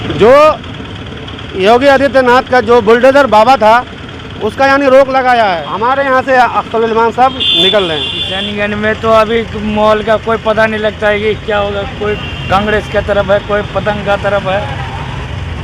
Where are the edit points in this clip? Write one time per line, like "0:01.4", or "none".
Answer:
0:05.7
0:08.3